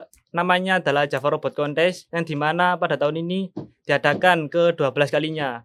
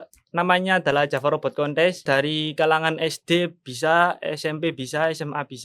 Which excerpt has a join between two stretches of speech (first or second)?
second